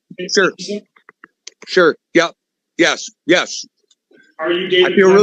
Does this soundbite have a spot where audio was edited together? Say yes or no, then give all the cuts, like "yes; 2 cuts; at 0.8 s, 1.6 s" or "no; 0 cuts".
no; 0 cuts